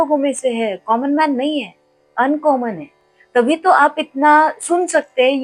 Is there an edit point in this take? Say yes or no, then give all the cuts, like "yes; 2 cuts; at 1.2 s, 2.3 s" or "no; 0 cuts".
no; 0 cuts